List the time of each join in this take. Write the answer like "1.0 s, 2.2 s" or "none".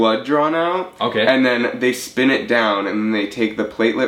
none